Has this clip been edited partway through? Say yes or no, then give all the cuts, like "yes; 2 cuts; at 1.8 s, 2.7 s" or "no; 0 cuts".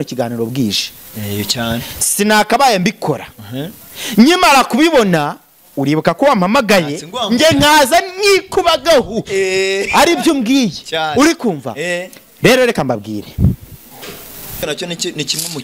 yes; 1 cut; at 14.6 s